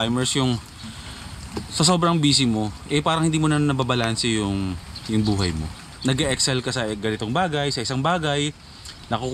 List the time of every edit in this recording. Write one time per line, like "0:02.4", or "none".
none

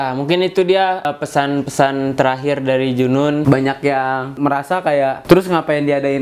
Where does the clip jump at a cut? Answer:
0:01.1
0:03.4
0:04.7

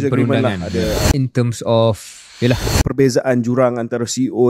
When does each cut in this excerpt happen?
0:01.1
0:02.7

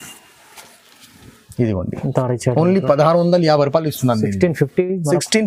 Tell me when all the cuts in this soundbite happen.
none

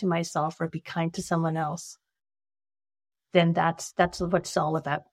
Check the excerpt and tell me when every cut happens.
none

